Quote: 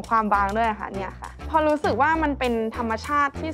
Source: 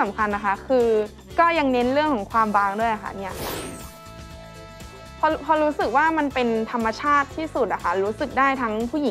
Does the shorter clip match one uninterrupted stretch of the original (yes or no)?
no